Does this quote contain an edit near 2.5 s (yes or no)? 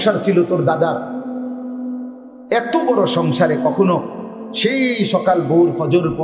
yes